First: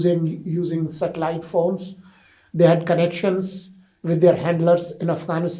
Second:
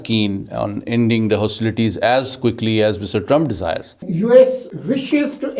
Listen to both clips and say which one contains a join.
second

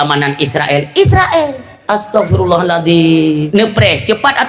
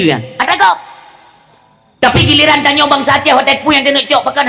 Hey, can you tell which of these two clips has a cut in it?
first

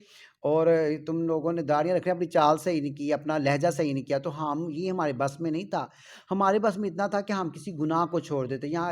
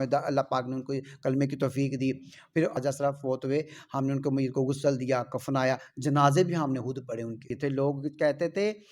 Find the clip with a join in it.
second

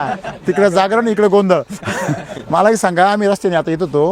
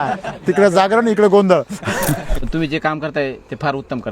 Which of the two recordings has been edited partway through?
second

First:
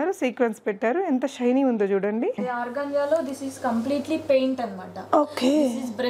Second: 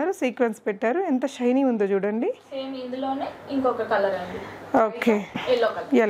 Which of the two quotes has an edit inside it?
first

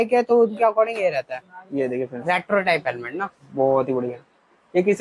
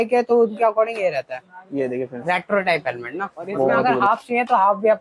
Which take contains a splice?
second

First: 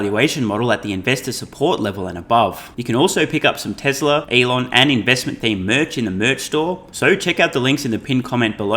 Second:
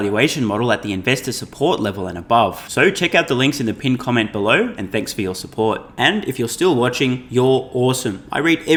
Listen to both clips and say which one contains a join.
first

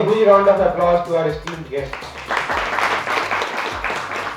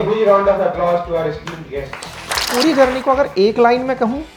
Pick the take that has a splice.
second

